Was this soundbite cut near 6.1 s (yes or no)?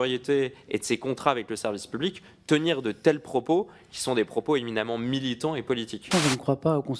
yes